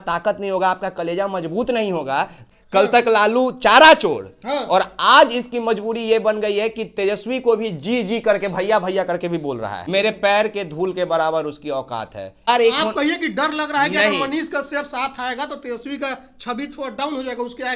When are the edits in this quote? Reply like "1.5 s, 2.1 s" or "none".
2.4 s, 9.8 s, 12.5 s